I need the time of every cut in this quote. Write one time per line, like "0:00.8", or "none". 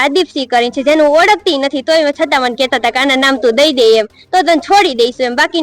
none